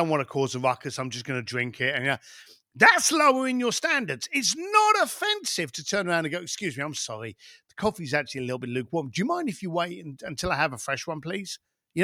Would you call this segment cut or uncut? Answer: uncut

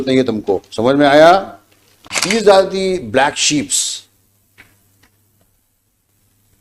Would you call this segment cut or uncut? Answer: cut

